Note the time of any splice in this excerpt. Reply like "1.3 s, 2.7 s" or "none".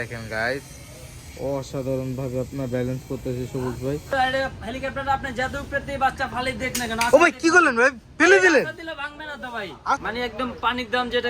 4.1 s, 10.0 s